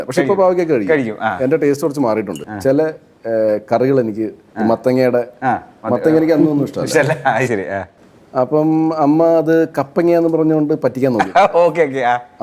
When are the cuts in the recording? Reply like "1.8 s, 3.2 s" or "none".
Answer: 2.4 s